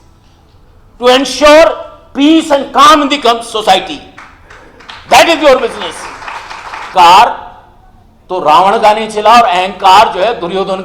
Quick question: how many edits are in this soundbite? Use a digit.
1